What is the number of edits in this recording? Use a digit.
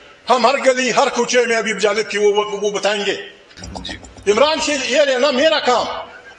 1